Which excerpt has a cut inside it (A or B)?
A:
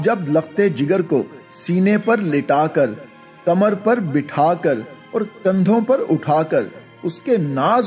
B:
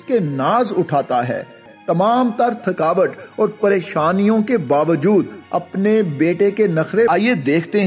B